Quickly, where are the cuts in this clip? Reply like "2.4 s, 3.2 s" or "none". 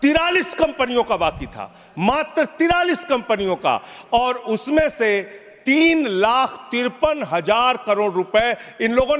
none